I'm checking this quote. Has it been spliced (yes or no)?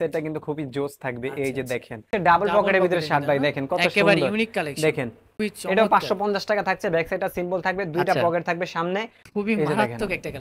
yes